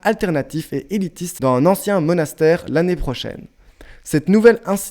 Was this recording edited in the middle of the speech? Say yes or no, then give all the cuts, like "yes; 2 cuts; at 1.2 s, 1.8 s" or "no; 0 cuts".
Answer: yes; 1 cut; at 1.2 s